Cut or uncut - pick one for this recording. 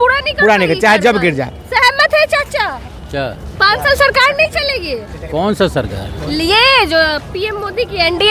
uncut